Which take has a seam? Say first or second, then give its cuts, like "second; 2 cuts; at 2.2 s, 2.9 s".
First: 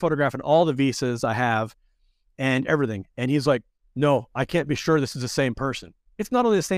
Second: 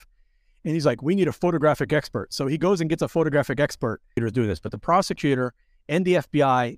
second; 1 cut; at 4.1 s